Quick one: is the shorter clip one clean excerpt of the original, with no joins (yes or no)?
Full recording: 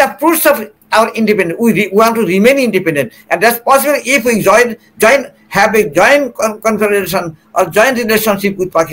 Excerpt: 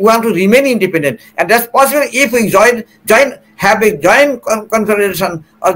yes